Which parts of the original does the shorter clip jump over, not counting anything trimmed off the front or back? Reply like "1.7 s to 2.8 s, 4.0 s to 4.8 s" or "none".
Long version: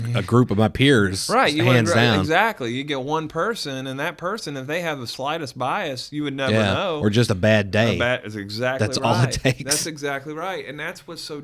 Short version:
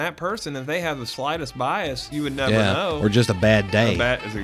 none